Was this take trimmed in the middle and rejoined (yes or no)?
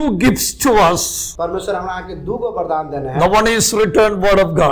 yes